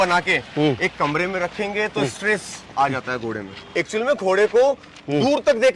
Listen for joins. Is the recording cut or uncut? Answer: cut